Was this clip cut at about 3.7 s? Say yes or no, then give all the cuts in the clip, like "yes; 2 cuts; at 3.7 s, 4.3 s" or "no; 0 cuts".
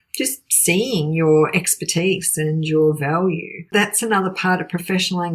yes; 1 cut; at 3.7 s